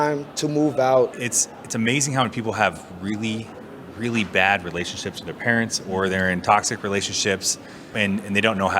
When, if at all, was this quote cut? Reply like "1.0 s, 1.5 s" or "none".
1.1 s